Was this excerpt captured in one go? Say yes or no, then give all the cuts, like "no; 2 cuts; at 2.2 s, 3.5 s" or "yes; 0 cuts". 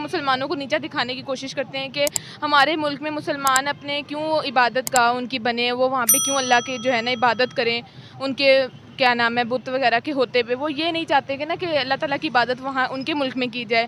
no; 1 cut; at 2.7 s